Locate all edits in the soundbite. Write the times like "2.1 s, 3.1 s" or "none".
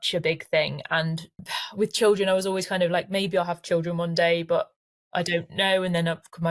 1.5 s